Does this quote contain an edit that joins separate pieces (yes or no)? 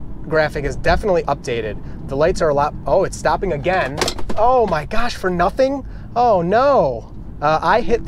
no